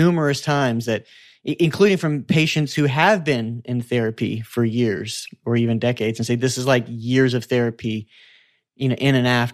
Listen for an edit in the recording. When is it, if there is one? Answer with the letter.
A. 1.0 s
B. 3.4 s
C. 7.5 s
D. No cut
D